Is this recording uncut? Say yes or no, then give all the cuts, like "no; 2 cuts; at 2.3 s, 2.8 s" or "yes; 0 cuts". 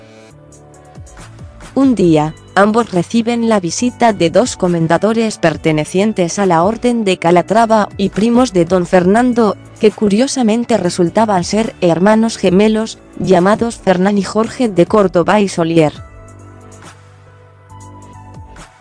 no; 1 cut; at 7.1 s